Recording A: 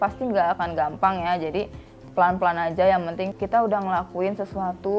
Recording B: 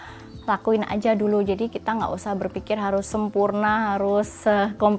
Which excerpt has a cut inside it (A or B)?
A